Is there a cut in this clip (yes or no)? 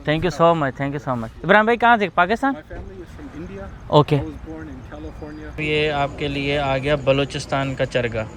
yes